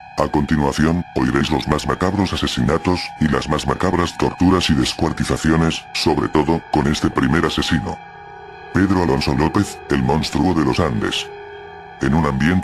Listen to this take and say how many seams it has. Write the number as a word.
one